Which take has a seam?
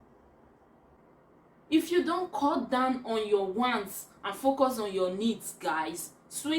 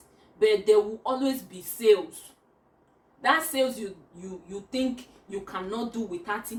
first; 1 cut; at 1.0 s

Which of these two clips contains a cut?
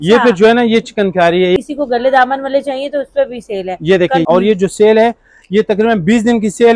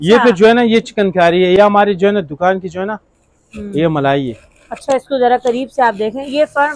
first; 2 cuts; at 1.6 s, 4.2 s

